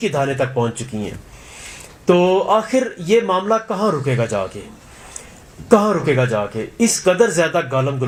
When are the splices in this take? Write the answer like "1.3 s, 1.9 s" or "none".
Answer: none